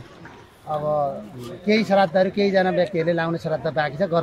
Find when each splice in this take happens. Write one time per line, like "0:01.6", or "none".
0:03.1